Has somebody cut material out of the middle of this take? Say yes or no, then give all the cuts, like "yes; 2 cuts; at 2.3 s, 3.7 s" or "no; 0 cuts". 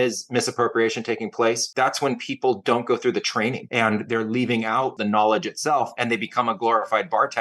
yes; 4 cuts; at 1.7 s, 3.6 s, 5.0 s, 6.0 s